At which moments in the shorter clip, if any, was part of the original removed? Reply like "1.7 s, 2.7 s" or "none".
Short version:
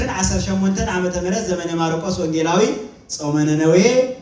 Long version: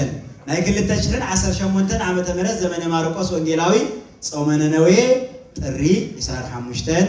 none